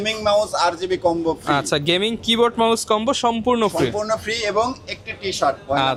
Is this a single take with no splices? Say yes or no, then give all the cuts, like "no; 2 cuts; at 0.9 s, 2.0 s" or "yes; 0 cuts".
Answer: yes; 0 cuts